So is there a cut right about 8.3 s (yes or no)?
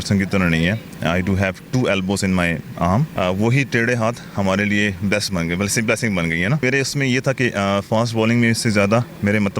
no